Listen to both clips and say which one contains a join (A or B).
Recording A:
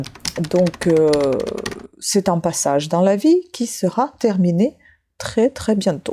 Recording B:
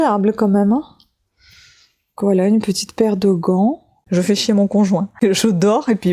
B